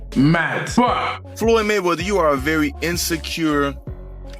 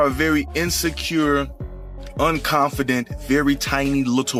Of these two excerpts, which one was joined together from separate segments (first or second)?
first